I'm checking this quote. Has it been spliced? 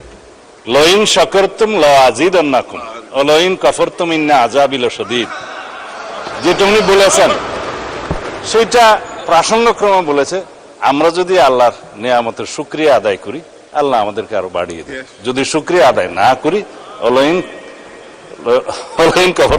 no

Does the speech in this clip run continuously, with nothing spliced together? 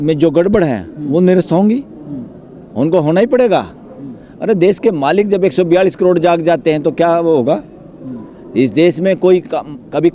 yes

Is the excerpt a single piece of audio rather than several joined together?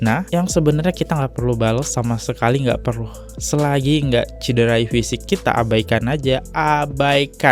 yes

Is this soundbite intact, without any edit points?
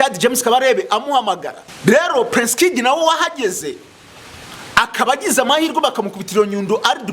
no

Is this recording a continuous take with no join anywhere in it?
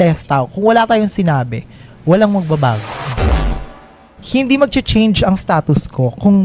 no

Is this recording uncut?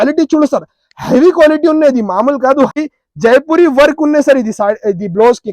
no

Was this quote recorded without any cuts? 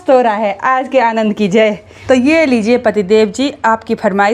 no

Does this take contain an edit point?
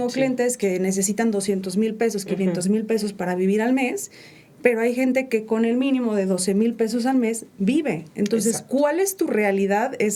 no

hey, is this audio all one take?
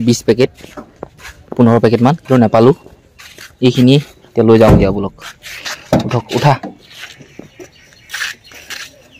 yes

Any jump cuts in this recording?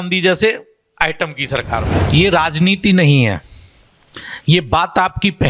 yes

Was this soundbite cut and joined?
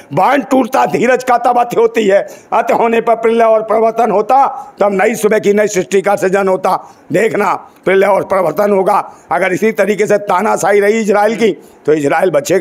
no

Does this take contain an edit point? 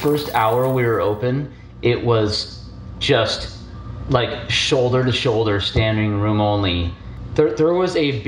yes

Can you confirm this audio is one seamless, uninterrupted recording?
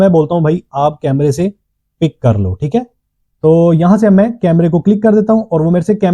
yes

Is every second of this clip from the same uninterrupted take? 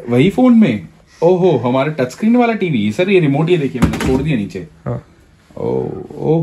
yes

